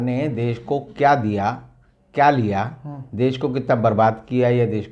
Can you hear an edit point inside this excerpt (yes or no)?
no